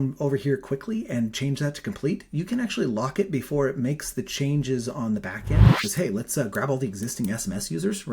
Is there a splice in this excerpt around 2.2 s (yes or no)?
no